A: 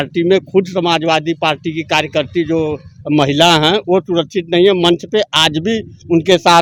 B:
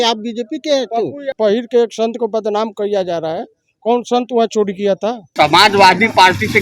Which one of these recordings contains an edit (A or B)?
B